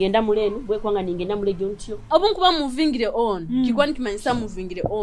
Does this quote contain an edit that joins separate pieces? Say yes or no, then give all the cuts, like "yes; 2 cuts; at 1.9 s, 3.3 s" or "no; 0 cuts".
yes; 1 cut; at 2.1 s